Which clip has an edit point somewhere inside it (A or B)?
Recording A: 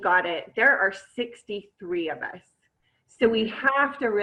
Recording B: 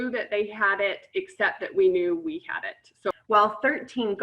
B